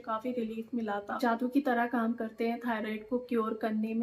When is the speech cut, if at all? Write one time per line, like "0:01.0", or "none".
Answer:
0:01.2